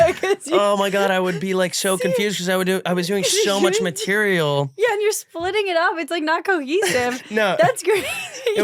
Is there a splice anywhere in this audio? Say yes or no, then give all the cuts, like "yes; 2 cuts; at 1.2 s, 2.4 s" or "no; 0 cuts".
no; 0 cuts